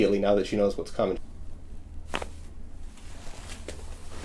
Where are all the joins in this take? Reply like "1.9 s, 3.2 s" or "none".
1.2 s